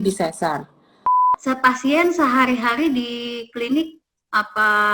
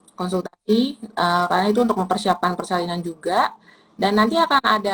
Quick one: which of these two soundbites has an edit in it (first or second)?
first